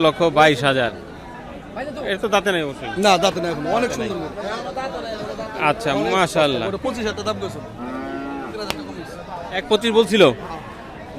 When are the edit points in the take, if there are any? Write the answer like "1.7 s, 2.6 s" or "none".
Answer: none